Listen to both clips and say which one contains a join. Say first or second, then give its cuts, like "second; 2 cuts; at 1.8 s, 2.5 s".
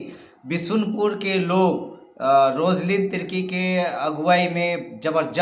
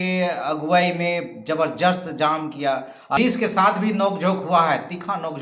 second; 1 cut; at 3.2 s